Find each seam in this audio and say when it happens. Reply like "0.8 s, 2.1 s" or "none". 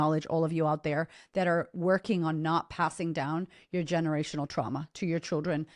none